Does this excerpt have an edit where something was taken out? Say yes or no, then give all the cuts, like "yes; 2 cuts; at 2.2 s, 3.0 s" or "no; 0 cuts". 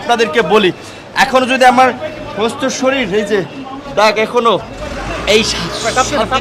no; 0 cuts